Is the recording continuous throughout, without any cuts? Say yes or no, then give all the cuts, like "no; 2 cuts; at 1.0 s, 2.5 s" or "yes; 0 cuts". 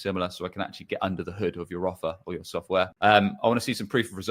no; 1 cut; at 2.9 s